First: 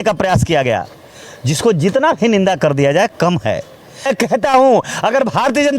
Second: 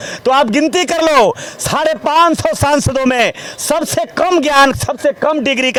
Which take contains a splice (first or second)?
first